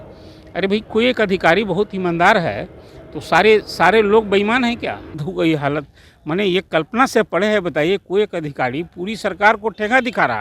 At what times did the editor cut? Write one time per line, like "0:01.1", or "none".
0:05.1